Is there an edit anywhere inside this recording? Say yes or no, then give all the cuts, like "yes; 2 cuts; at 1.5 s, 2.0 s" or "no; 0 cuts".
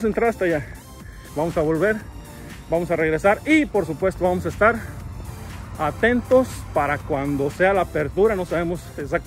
yes; 1 cut; at 1.2 s